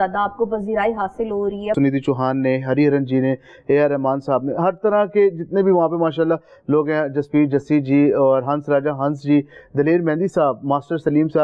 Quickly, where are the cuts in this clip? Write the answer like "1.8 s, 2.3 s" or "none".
1.8 s